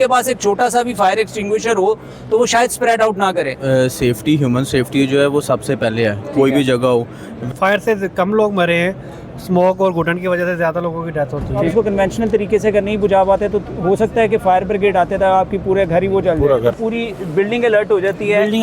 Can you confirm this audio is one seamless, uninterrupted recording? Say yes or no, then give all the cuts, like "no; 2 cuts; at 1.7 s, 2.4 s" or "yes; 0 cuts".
no; 4 cuts; at 3.6 s, 7.3 s, 11.6 s, 16.7 s